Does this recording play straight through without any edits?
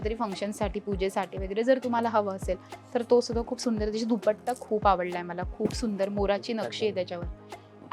yes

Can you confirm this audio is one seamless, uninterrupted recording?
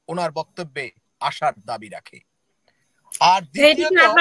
yes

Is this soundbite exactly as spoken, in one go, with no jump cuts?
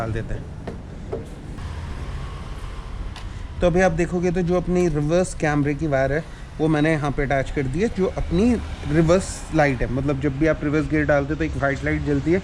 yes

